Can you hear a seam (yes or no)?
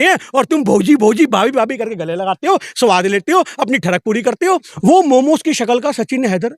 yes